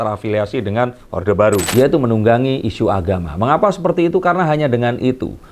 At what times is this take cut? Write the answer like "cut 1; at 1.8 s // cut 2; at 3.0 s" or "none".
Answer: cut 1; at 1.7 s